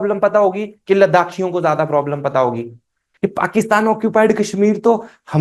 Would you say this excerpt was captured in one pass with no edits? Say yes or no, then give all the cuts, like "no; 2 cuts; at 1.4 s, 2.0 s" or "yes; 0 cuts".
no; 1 cut; at 3.1 s